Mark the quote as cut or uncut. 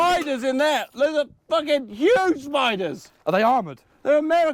uncut